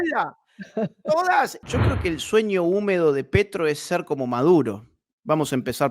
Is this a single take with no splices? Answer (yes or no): no